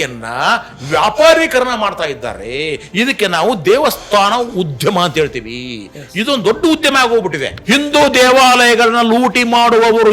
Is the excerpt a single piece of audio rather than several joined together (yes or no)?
no